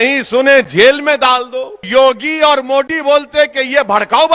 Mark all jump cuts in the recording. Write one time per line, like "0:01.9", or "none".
0:01.8